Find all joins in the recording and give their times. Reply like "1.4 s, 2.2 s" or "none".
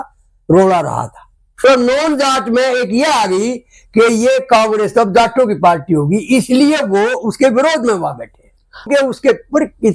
1.4 s, 8.9 s